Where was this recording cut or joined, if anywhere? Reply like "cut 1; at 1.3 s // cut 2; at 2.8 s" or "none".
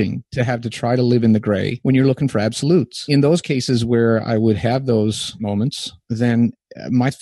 cut 1; at 1.7 s // cut 2; at 3.1 s // cut 3; at 5.5 s